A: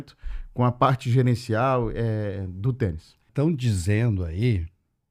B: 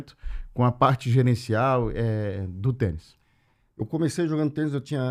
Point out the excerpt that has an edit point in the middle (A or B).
A